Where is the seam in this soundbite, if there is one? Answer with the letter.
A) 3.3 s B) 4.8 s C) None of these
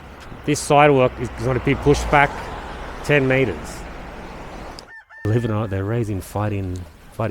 B